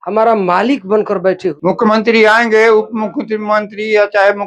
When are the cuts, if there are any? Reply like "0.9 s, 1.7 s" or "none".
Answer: 1.6 s